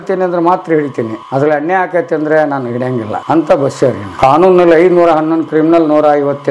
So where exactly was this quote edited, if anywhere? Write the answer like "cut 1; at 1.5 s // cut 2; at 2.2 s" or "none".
cut 1; at 1.2 s // cut 2; at 3.1 s // cut 3; at 4.1 s